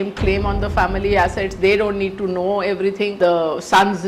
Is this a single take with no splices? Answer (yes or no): no